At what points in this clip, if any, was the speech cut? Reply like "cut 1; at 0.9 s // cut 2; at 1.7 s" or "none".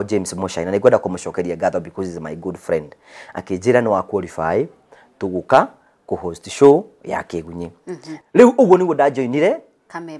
cut 1; at 8.1 s

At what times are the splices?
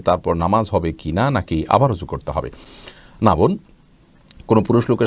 none

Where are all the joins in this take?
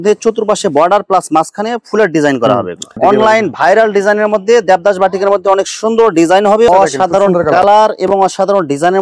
cut 1; at 2.8 s // cut 2; at 6.7 s

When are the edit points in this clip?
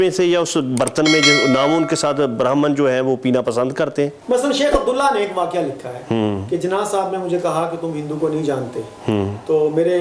cut 1; at 4.2 s

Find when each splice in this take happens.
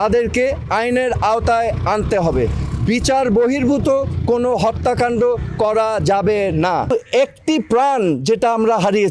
cut 1; at 6.9 s

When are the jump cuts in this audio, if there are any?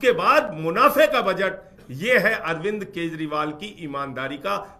none

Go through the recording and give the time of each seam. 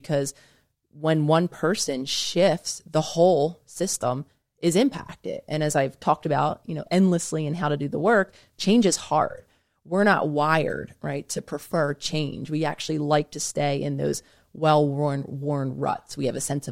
none

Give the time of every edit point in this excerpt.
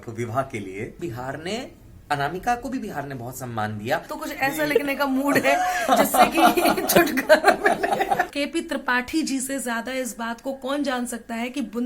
cut 1; at 1.0 s // cut 2; at 4.1 s // cut 3; at 8.3 s

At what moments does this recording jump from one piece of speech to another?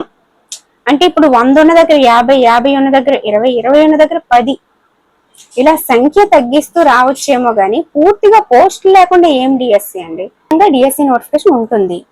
cut 1; at 10.4 s

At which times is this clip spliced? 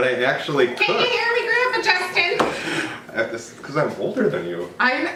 none

